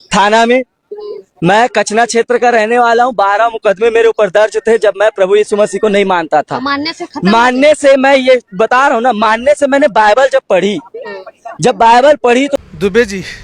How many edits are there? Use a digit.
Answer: 1